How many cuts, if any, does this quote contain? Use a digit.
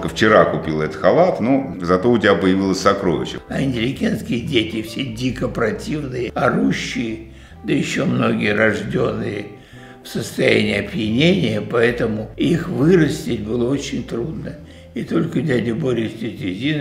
2